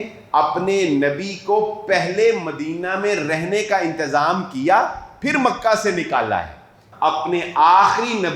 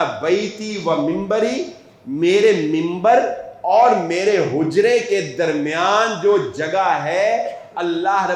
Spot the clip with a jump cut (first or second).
first